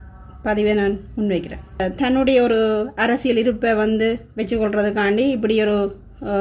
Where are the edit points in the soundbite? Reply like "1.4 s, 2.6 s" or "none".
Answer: 1.8 s